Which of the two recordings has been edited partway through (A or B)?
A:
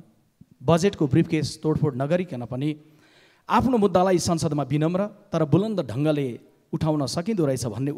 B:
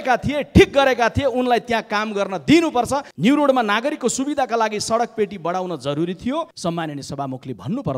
B